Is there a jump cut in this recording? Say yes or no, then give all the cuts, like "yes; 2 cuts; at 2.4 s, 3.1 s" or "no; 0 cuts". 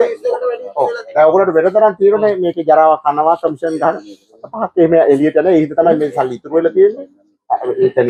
no; 0 cuts